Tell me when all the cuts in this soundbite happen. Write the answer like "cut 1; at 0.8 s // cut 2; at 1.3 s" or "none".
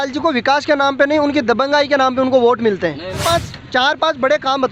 cut 1; at 3.2 s

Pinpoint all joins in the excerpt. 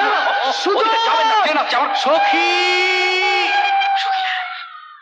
none

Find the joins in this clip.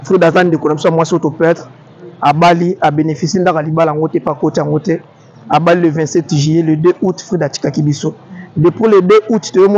none

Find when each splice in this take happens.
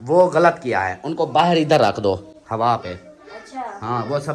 none

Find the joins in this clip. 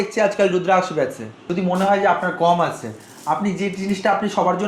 cut 1; at 1.5 s

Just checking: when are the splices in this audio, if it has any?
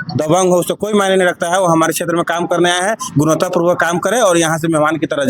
none

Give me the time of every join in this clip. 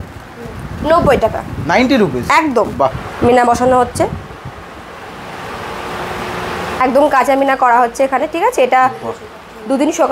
cut 1; at 3.0 s // cut 2; at 6.8 s

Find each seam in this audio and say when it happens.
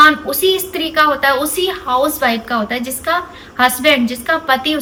none

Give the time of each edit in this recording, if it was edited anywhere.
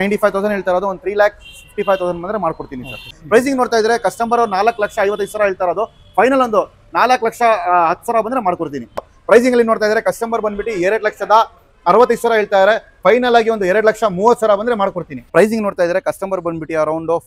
cut 1; at 3.1 s // cut 2; at 9.1 s // cut 3; at 15.1 s

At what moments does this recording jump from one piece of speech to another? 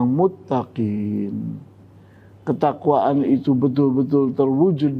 none

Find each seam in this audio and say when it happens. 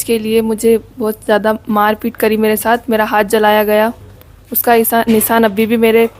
none

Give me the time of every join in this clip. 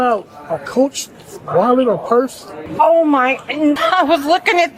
cut 1; at 2.6 s // cut 2; at 3.8 s

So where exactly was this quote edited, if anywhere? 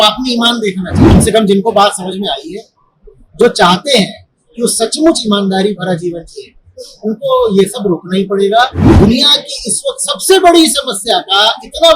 cut 1; at 1.0 s // cut 2; at 8.8 s

